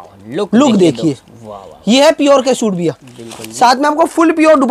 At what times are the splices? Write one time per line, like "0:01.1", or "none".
none